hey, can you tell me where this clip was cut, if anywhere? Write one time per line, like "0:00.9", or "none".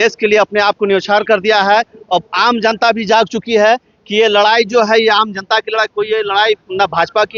none